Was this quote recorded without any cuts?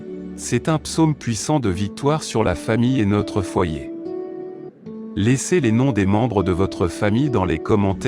no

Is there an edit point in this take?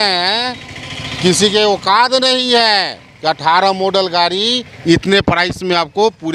no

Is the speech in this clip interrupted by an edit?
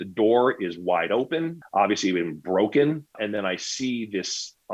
yes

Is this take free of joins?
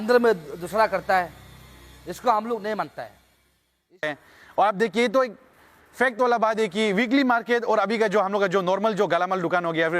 no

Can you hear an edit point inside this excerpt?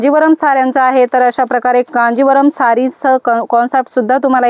no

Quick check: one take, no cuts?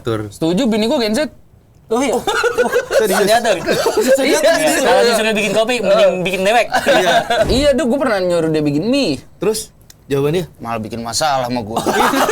no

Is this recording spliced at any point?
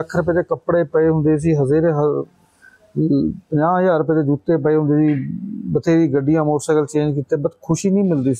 no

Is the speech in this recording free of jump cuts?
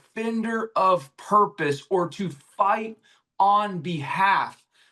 yes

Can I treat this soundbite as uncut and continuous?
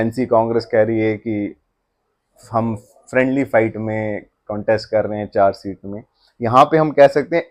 yes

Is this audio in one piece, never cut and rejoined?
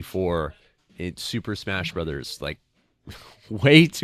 yes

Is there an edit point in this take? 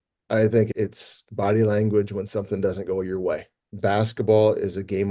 yes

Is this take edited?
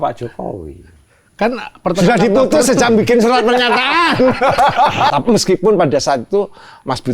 yes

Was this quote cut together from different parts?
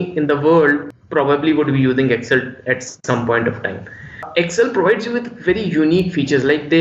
yes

